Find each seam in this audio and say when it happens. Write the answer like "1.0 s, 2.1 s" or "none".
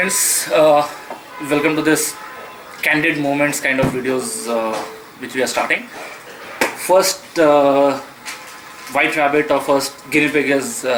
none

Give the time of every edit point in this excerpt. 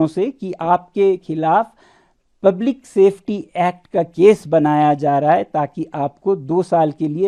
none

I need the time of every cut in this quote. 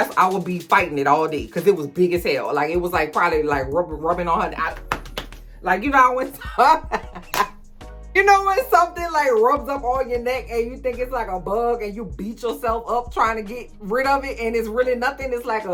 none

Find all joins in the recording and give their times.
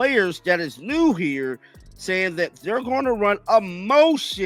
none

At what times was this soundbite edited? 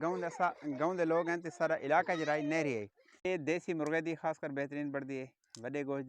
3.2 s

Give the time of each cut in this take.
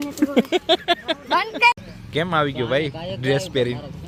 none

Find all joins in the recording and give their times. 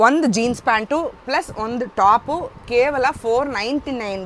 none

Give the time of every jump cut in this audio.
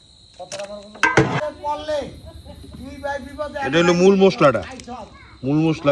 none

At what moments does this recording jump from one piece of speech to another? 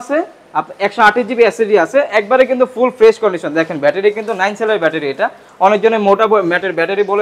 none

